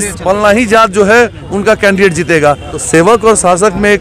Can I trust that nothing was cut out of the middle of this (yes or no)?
no